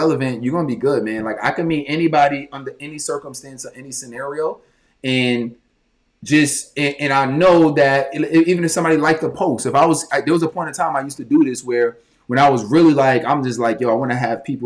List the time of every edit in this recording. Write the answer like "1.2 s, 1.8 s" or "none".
none